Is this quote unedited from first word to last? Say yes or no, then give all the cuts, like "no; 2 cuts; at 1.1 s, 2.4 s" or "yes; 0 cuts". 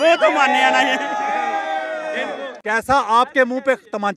no; 1 cut; at 2.6 s